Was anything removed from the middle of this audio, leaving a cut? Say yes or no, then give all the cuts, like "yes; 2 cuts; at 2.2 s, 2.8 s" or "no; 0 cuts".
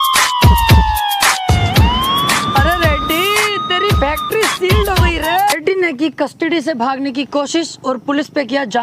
yes; 1 cut; at 5.5 s